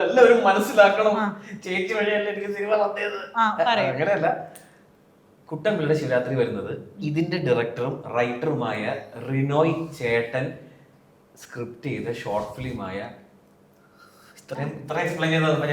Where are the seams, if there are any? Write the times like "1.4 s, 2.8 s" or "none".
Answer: none